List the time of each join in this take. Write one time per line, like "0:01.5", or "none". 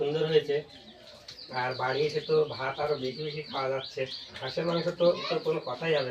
0:04.4
0:05.2

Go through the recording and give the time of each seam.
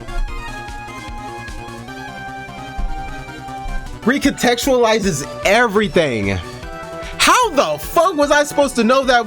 0:03.9

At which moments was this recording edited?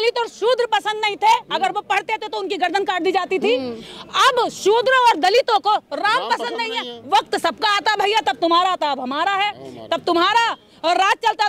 none

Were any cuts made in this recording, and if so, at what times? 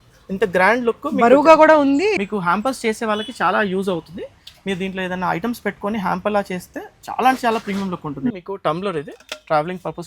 0:02.2
0:08.3

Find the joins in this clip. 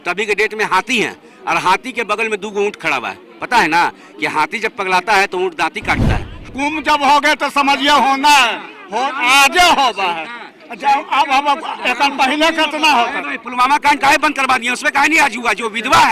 0:06.4

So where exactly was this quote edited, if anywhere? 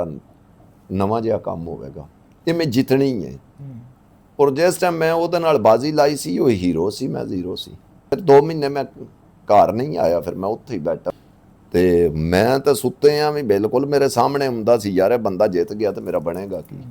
0:08.1
0:11.1

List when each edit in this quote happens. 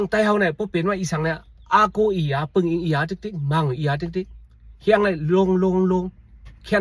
none

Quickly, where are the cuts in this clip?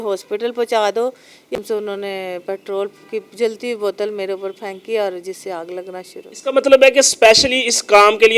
0:01.6

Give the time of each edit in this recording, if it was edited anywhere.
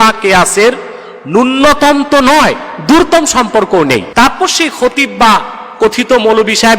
0:04.1

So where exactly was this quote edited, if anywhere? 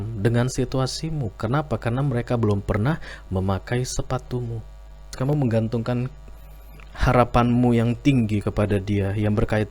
0:05.1

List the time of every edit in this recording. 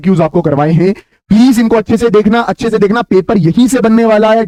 none

